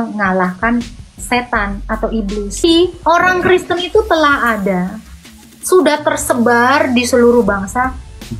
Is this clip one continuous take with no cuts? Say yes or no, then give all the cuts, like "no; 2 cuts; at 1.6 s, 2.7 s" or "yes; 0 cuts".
no; 1 cut; at 2.6 s